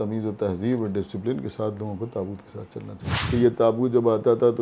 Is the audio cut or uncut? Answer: cut